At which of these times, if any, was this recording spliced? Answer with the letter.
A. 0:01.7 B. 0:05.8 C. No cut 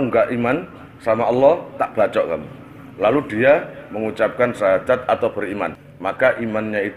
B